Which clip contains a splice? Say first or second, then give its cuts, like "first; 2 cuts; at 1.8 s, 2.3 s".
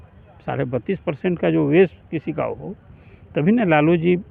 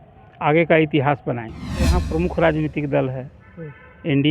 second; 1 cut; at 1.9 s